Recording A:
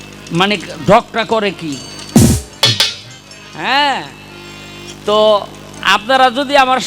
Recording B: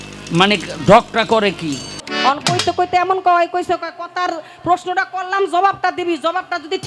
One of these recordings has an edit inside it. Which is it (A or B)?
B